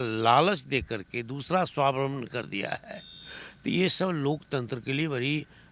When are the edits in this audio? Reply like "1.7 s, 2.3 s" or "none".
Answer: none

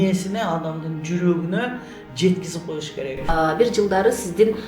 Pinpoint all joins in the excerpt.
3.3 s

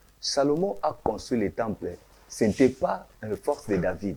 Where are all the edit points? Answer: none

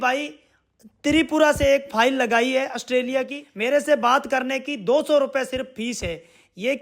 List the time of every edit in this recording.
3.4 s

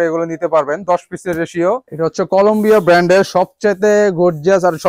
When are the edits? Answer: 1.8 s

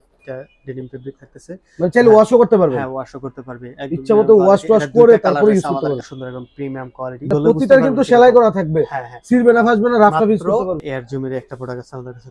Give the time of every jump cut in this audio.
6.7 s, 10.9 s

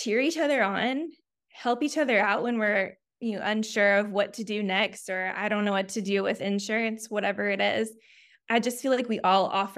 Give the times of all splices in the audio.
8.3 s

